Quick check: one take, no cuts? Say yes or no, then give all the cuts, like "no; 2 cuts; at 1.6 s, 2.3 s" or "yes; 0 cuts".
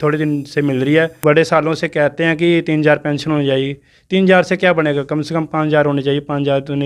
no; 1 cut; at 1.2 s